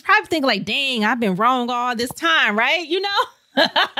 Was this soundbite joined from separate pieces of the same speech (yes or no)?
no